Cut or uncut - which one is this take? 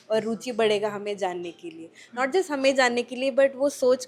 uncut